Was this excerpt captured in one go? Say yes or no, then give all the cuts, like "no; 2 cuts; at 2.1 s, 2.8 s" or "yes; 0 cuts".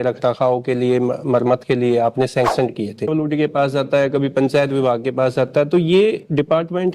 no; 1 cut; at 3.1 s